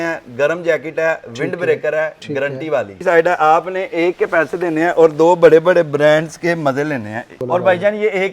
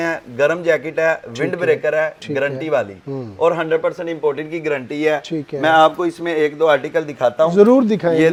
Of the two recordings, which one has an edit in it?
first; 2 cuts; at 2.9 s, 7.4 s

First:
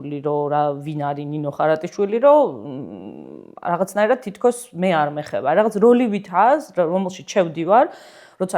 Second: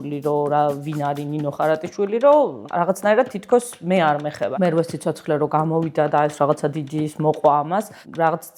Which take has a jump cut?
second; 2 cuts; at 2.6 s, 4.4 s

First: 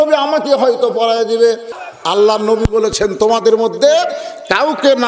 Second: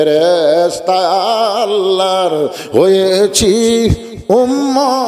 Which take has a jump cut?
first; 1 cut; at 1.7 s

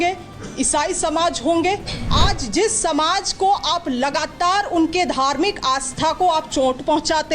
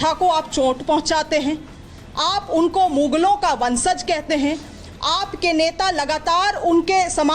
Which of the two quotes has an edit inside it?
first; 1 cut; at 2.0 s

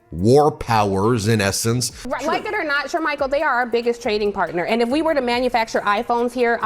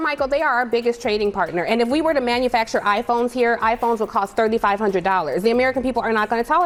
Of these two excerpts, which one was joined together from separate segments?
first; 1 cut; at 2.0 s

